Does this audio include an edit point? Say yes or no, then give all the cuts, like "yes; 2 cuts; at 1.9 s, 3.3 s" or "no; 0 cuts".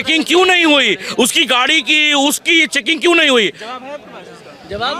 no; 0 cuts